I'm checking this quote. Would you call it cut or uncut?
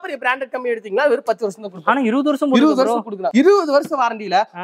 uncut